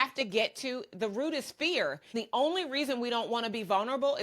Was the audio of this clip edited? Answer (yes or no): yes